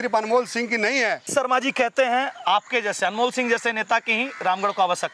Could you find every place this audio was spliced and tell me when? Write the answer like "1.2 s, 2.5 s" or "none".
1.3 s